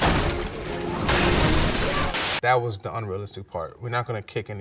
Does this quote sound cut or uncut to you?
cut